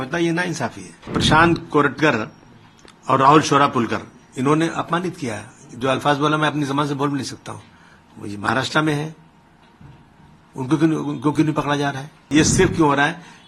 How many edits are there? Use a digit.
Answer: 2